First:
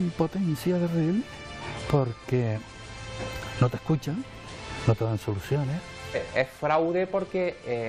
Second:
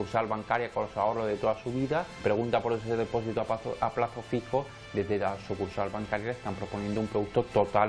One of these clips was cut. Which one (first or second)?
first